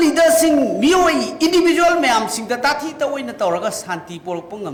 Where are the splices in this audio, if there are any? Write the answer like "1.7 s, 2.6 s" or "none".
none

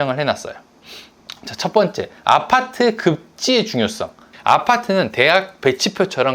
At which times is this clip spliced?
4.3 s

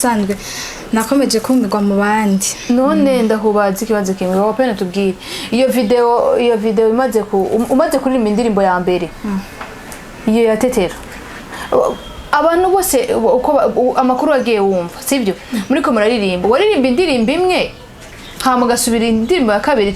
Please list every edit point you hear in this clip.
none

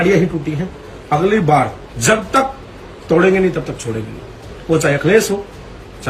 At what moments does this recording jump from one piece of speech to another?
1.9 s

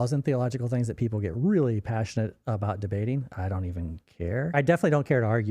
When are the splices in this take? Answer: 3.3 s, 4.5 s

